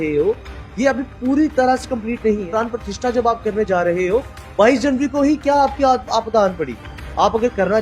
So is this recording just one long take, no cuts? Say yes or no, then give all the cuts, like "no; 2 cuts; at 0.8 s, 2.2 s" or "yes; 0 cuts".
no; 1 cut; at 2.4 s